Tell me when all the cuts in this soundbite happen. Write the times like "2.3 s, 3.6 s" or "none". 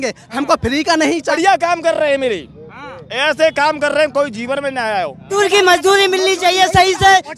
1.3 s, 5.3 s